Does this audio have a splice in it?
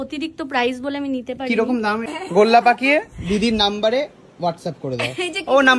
yes; 1 cut; at 2.1 s

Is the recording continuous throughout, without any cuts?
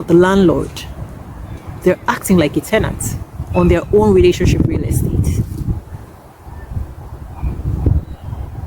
yes; 0 cuts

